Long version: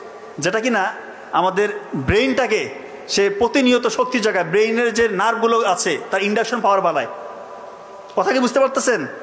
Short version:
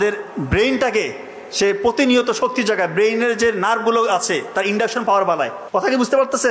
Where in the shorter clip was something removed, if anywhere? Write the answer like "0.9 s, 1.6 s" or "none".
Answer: 5.6 s